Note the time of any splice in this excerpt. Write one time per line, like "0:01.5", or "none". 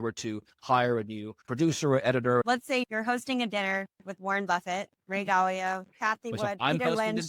0:02.4